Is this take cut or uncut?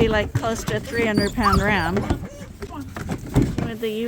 uncut